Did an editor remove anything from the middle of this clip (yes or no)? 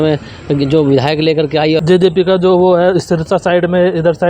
yes